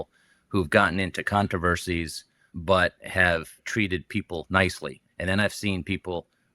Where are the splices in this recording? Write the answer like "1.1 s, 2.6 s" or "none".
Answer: 2.5 s, 3.6 s, 5.0 s

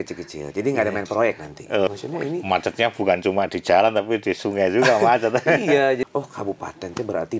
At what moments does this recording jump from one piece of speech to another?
1.9 s, 6.0 s

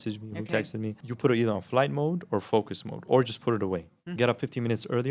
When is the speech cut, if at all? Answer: 1.1 s, 4.1 s

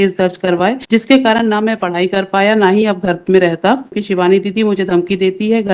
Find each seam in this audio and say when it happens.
0.8 s, 4.0 s

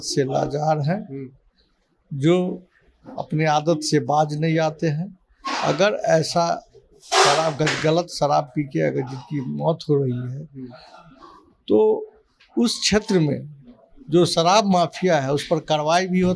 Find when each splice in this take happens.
none

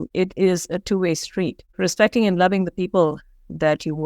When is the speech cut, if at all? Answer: 1.6 s

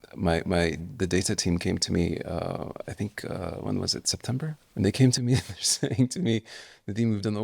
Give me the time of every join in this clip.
4.6 s

